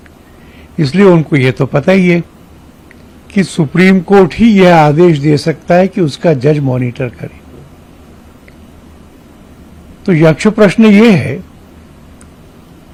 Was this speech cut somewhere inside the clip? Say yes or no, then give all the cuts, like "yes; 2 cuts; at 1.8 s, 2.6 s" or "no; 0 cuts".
no; 0 cuts